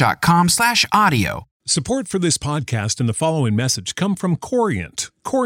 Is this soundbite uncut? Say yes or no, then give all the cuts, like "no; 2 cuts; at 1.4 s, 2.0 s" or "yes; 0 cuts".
no; 1 cut; at 1.5 s